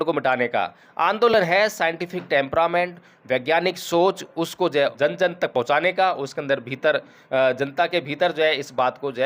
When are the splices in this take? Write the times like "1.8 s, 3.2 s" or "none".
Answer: 4.9 s